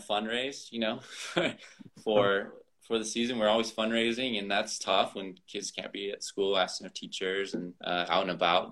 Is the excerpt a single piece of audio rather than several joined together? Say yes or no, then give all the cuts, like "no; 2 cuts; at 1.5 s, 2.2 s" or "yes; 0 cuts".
no; 1 cut; at 7.7 s